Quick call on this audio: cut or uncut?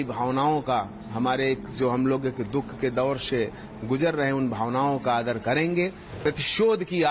cut